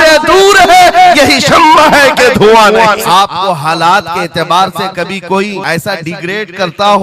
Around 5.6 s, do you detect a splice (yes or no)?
yes